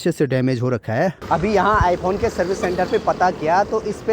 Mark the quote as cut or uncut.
cut